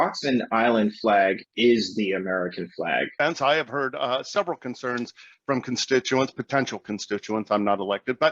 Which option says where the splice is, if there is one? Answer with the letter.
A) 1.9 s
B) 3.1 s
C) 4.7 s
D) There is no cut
B